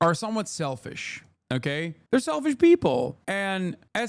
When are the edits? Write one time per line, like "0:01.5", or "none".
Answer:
none